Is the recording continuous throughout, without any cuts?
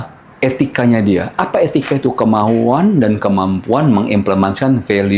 yes; 0 cuts

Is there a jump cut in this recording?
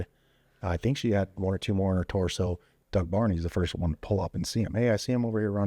yes; 1 cut; at 2.7 s

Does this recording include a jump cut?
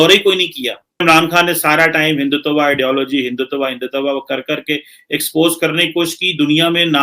yes; 1 cut; at 1.0 s

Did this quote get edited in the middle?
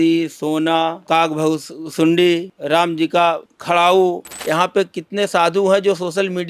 yes; 4 cuts; at 1.0 s, 2.5 s, 3.5 s, 4.3 s

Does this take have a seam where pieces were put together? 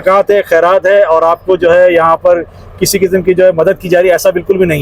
no; 0 cuts

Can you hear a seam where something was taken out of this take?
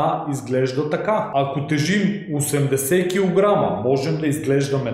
yes; 1 cut; at 1.3 s

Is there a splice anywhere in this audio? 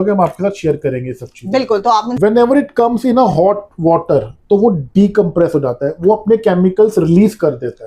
yes; 1 cut; at 2.2 s

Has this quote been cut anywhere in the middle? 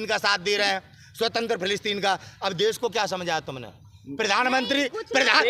no; 0 cuts

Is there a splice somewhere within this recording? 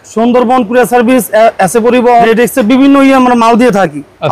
yes; 1 cut; at 2.2 s

